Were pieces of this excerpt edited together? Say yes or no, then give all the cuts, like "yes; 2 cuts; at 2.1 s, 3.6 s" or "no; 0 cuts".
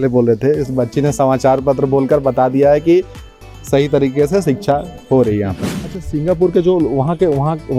yes; 1 cut; at 5.6 s